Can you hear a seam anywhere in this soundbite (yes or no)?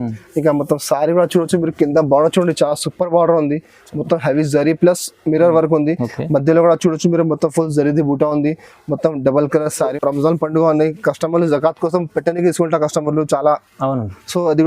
yes